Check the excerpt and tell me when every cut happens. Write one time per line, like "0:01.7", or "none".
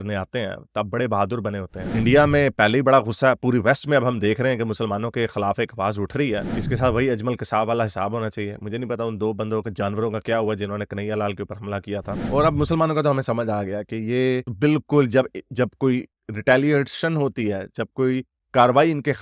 0:01.8
0:06.4
0:12.2